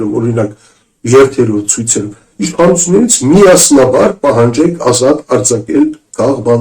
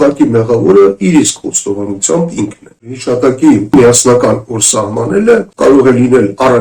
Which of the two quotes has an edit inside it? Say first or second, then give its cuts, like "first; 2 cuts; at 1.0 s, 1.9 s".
second; 3 cuts; at 2.9 s, 3.7 s, 5.5 s